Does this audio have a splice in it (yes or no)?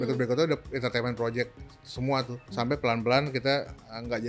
yes